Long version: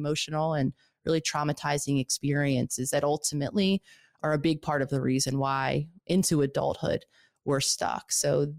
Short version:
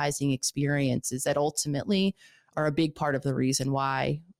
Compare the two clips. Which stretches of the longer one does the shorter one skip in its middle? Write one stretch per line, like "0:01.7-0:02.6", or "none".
none